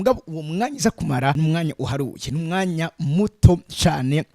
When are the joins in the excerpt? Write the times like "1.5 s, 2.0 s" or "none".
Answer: 1.4 s

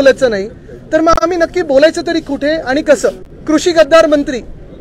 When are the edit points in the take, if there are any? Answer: 3.3 s

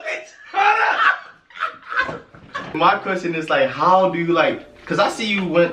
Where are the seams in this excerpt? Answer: 2.7 s

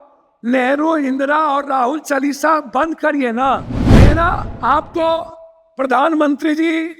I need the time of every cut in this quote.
4.0 s

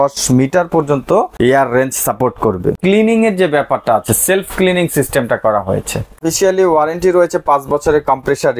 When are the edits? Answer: 1.3 s, 2.8 s, 6.2 s

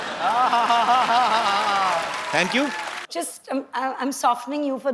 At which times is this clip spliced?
3.0 s

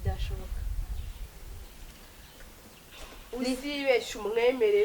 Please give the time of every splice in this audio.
none

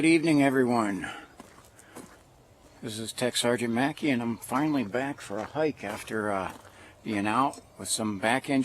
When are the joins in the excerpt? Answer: 1.5 s

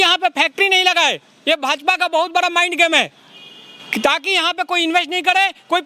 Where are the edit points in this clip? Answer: none

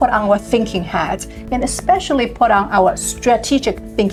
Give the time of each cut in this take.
none

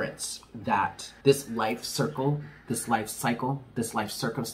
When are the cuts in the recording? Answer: 1.1 s, 2.5 s

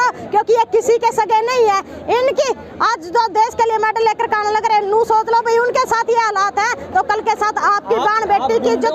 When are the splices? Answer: none

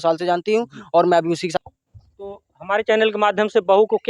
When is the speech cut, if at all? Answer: 1.6 s

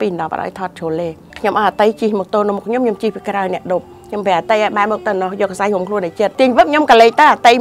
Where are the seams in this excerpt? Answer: 1.2 s, 6.3 s

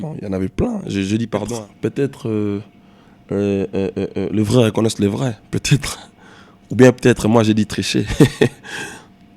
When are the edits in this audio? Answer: 1.6 s

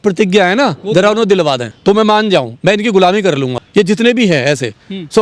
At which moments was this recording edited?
1.7 s, 3.6 s

